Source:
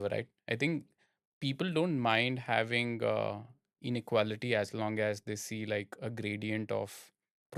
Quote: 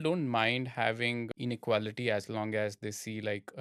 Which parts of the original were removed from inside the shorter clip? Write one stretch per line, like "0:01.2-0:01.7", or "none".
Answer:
0:03.0-0:03.7